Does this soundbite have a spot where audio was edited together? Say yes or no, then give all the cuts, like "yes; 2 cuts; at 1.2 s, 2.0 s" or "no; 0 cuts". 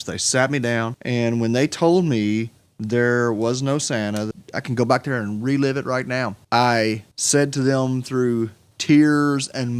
yes; 5 cuts; at 1.0 s, 4.3 s, 6.4 s, 7.1 s, 8.6 s